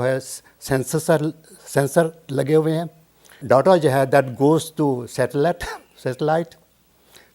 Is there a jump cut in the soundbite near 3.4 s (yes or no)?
yes